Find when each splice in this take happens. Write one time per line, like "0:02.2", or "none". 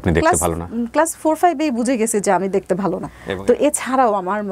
0:03.1